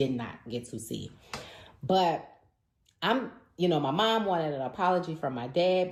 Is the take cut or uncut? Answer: uncut